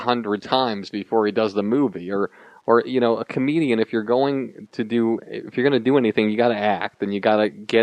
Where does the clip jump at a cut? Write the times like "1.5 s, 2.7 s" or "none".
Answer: 5.5 s